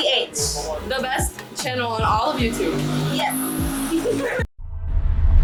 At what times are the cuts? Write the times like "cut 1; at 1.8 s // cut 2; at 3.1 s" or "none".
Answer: none